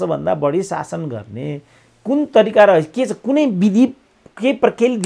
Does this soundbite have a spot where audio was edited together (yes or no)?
no